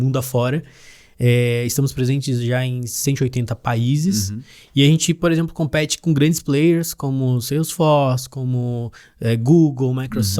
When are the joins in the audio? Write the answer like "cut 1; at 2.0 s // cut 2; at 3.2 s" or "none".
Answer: none